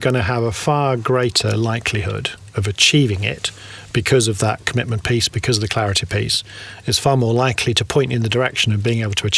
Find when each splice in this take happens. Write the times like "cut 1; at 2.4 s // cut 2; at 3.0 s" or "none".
none